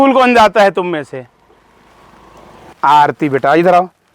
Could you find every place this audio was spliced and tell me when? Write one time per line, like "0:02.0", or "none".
0:02.5